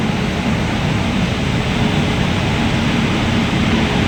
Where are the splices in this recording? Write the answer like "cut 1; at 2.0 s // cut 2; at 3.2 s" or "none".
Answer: none